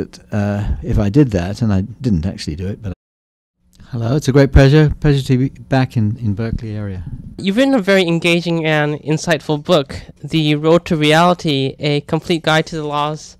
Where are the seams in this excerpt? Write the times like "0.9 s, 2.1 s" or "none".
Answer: none

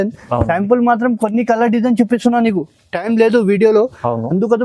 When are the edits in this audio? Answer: none

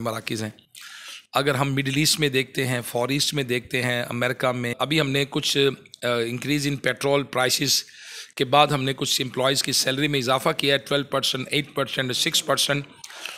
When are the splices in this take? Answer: 4.7 s

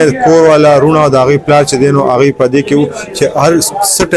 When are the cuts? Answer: none

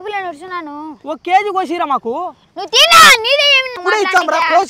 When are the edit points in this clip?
3.8 s

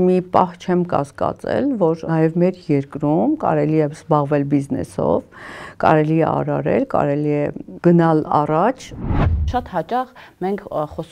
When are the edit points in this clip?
9.2 s

